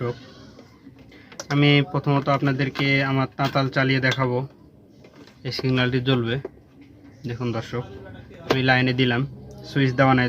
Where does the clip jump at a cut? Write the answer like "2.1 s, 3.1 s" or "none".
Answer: 5.2 s